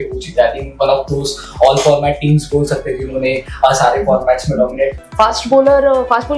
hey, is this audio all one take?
no; 1 cut; at 4.9 s

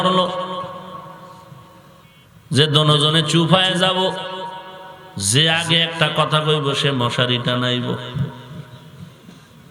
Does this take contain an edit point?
yes; 1 cut; at 2.1 s

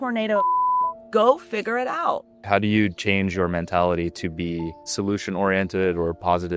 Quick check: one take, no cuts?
yes; 0 cuts

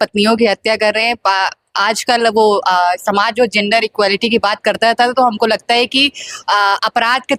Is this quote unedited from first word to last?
yes; 0 cuts

